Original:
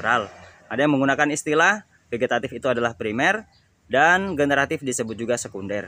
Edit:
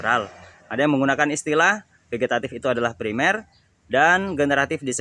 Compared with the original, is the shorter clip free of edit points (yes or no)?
yes